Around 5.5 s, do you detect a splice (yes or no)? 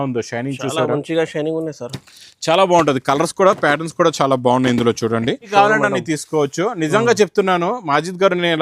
yes